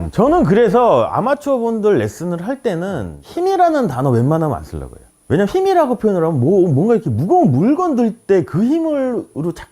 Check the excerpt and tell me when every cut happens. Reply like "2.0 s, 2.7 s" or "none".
3.1 s